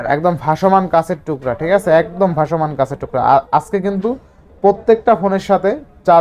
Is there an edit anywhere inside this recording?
no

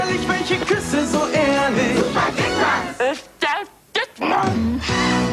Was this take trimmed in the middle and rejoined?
no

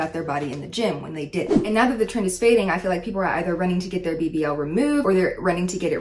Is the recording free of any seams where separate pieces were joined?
no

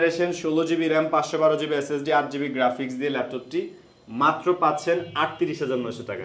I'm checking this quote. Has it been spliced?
no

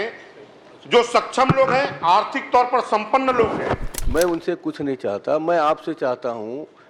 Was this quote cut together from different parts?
yes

